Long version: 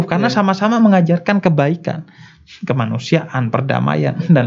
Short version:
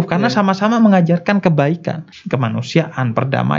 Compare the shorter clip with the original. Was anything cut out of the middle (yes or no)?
yes